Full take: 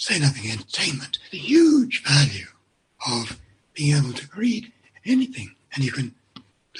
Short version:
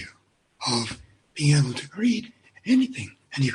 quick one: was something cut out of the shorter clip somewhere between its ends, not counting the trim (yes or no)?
no